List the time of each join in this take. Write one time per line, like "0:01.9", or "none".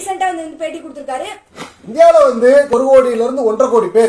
0:01.4
0:02.7